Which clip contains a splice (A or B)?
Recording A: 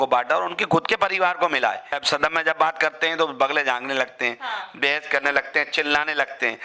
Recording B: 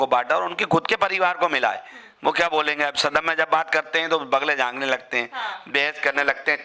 A